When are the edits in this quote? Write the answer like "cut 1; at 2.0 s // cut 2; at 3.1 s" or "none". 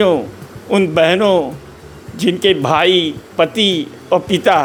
none

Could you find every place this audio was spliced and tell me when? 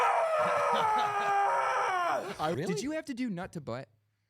cut 1; at 2.6 s

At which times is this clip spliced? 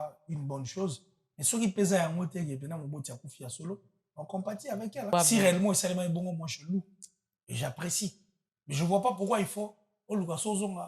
cut 1; at 5.1 s

